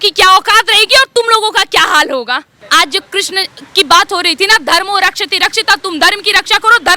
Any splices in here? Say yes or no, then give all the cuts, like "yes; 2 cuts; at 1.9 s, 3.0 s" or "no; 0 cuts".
yes; 1 cut; at 2.6 s